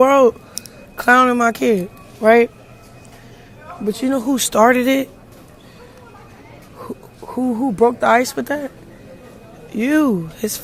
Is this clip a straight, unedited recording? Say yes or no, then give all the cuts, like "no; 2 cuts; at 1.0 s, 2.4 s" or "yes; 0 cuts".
yes; 0 cuts